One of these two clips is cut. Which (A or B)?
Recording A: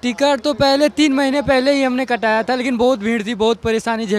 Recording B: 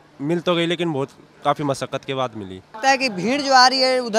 B